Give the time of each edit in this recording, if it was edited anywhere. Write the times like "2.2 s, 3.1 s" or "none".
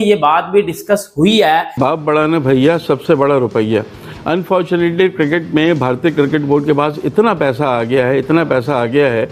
1.7 s